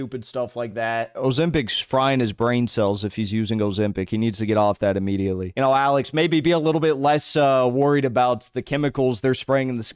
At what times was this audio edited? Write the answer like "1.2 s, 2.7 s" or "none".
1.1 s, 5.5 s